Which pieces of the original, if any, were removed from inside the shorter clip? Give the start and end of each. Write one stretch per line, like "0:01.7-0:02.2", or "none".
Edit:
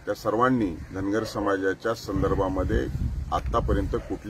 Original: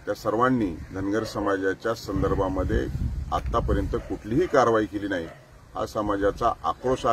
none